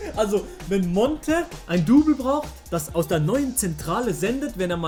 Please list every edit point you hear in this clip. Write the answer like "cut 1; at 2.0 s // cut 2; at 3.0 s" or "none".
none